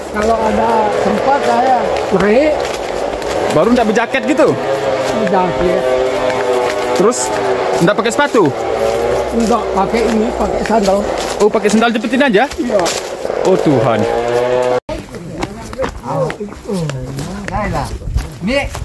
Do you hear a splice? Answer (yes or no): yes